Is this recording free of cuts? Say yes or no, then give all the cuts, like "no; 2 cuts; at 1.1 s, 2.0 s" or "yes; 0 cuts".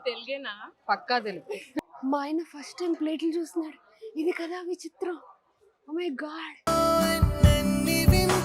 no; 1 cut; at 1.7 s